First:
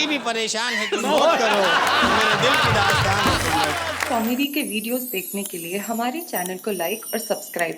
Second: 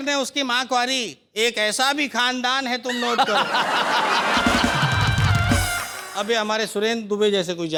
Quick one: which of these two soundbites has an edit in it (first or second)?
first